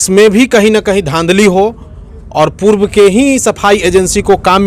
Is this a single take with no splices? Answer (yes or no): yes